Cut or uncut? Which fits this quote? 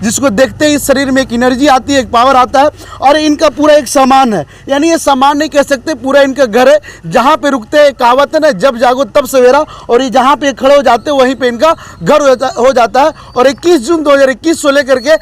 uncut